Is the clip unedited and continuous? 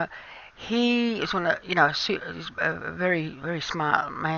yes; 0 cuts

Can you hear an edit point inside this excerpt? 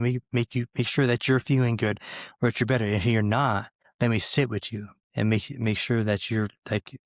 yes; 1 cut; at 3.8 s

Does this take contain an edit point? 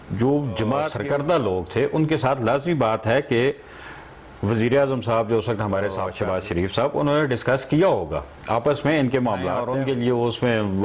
yes; 3 cuts; at 0.9 s, 6.1 s, 9.6 s

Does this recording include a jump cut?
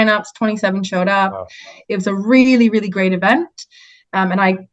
no; 0 cuts

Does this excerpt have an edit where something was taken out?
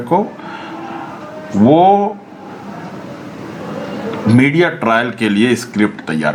no; 0 cuts

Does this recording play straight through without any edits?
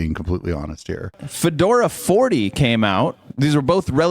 no; 2 cuts; at 1.2 s, 3.2 s

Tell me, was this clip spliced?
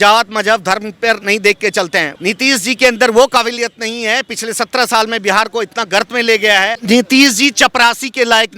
yes; 2 cuts; at 2.1 s, 6.8 s

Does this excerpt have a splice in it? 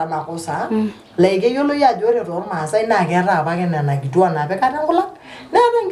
no; 0 cuts

